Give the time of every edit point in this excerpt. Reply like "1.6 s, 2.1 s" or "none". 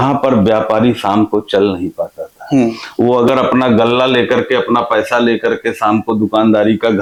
none